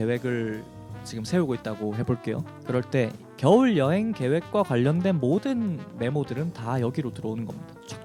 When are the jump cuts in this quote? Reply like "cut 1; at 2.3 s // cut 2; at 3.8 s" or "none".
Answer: none